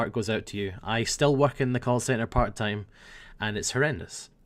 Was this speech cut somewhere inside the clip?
no; 0 cuts

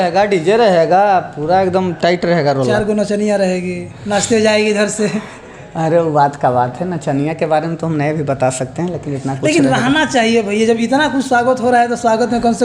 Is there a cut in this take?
no; 0 cuts

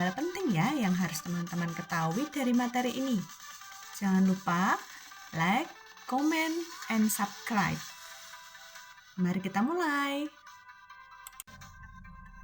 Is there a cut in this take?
yes; 1 cut; at 11.4 s

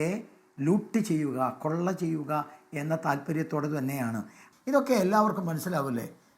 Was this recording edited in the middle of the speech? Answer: yes; 1 cut; at 4.4 s

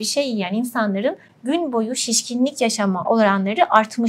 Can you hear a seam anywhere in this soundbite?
yes; 1 cut; at 3.0 s

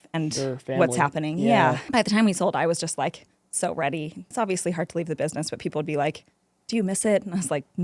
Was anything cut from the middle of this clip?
yes; 2 cuts; at 1.8 s, 4.3 s

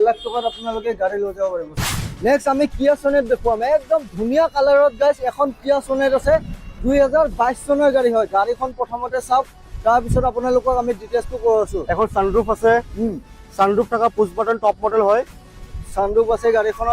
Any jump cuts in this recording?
yes; 2 cuts; at 2.1 s, 15.7 s

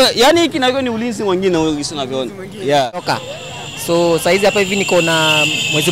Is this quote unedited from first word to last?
no; 1 cut; at 3.0 s

